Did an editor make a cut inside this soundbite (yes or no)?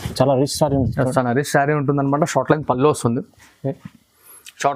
no